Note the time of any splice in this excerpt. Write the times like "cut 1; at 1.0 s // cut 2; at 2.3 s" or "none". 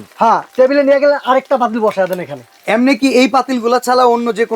cut 1; at 2.5 s